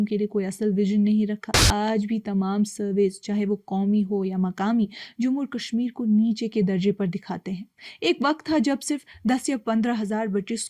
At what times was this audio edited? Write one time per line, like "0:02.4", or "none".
0:01.6